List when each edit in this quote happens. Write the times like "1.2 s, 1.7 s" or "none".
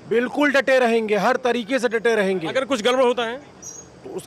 none